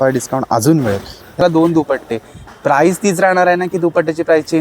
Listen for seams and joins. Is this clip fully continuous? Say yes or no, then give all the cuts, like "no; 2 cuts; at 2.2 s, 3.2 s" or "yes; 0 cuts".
no; 1 cut; at 1.4 s